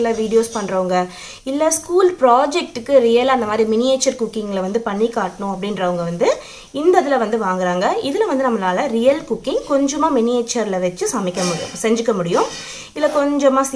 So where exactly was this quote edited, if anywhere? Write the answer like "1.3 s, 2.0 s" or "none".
none